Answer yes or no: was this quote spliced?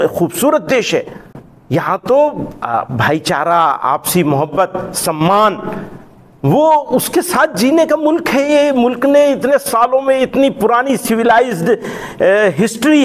no